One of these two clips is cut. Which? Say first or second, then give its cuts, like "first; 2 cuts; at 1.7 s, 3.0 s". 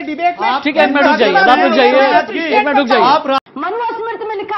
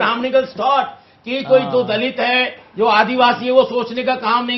first; 1 cut; at 3.4 s